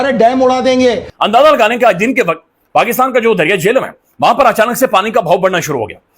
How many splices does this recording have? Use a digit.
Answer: 1